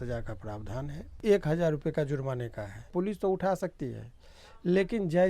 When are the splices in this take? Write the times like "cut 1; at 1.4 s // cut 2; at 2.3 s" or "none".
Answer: cut 1; at 1.1 s // cut 2; at 2.9 s